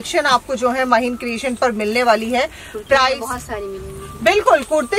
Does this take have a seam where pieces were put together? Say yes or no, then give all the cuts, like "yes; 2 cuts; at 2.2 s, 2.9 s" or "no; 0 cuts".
no; 0 cuts